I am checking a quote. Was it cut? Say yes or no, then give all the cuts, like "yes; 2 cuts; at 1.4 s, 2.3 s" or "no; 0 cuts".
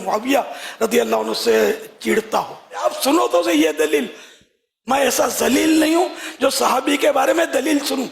yes; 1 cut; at 2.8 s